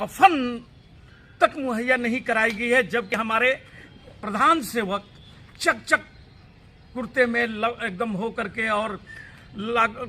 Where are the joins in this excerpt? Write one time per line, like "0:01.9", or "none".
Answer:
none